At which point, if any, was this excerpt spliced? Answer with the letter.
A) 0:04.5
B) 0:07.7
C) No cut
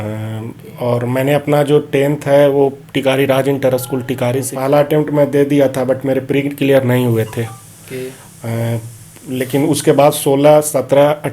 A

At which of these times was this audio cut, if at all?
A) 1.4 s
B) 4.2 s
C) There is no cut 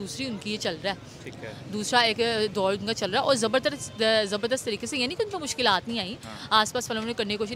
C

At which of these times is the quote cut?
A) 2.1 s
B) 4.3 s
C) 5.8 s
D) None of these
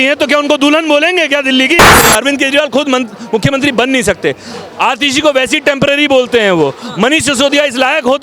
A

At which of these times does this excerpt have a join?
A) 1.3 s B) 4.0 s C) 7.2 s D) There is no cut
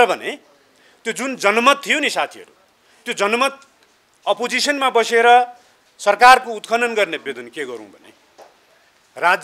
C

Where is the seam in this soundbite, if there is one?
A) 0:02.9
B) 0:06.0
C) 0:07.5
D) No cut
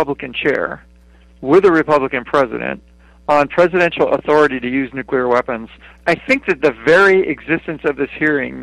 B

